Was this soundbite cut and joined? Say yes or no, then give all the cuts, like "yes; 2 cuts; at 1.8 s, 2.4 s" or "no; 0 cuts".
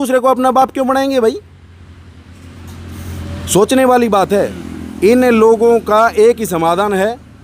no; 0 cuts